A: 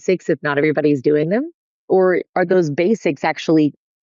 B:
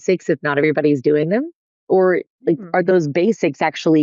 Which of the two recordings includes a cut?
A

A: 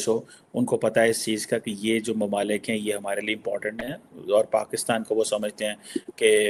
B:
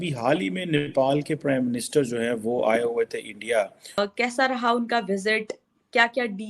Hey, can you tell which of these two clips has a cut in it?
B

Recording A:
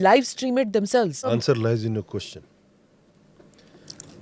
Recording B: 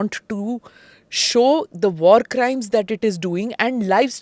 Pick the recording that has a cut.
A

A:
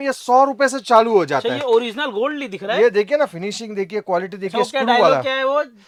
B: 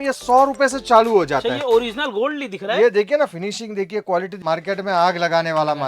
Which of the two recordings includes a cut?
B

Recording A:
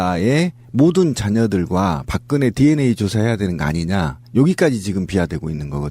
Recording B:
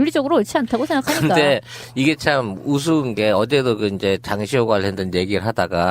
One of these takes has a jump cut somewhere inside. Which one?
B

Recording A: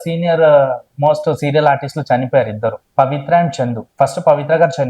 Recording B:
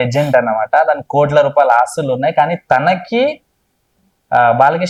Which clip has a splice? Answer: A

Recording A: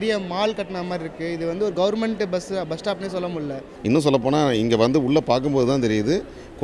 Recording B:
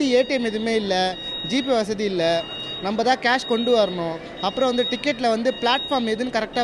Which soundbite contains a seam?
A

